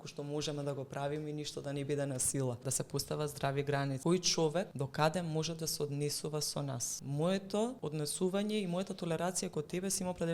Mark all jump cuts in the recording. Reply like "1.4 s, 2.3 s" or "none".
2.7 s, 4.0 s, 4.8 s, 6.9 s, 7.8 s